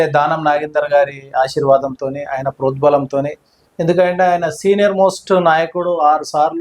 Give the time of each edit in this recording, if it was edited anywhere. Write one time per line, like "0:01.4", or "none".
none